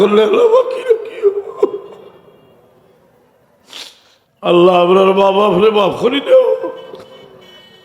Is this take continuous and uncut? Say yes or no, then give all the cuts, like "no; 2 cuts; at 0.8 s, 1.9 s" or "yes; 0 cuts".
no; 1 cut; at 4.2 s